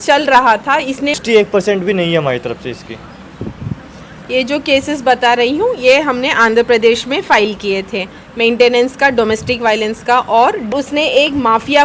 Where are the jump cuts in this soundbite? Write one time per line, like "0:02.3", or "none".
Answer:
0:01.2
0:10.7